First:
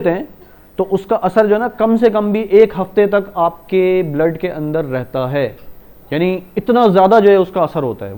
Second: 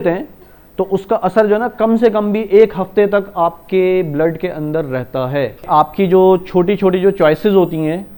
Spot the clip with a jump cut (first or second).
second